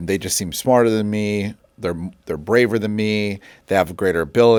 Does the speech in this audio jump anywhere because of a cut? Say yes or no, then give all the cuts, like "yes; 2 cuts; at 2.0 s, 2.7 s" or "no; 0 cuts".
no; 0 cuts